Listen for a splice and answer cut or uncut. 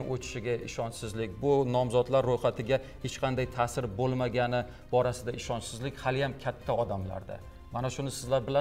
uncut